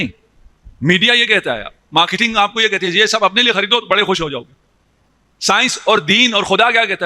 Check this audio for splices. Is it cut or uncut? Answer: uncut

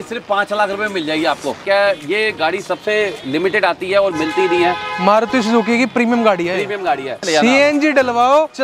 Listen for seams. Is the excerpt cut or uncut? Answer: cut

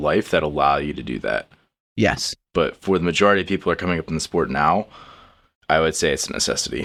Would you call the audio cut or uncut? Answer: uncut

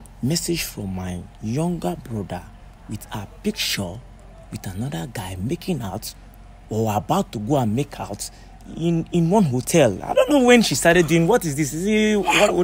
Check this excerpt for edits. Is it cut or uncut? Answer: uncut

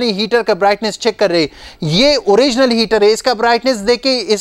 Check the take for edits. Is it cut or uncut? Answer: uncut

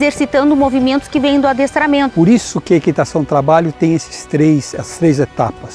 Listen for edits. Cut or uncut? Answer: uncut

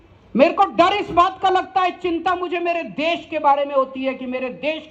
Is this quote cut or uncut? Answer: uncut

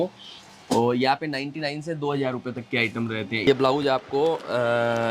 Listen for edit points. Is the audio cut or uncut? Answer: cut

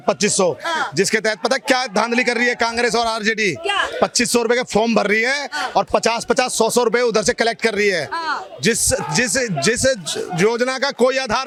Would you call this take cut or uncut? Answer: uncut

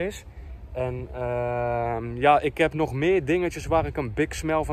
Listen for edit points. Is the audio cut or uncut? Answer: uncut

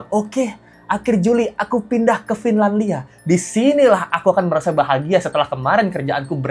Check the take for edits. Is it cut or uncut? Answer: uncut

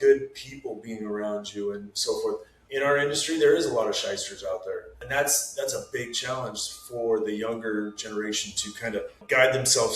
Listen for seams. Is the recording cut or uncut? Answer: cut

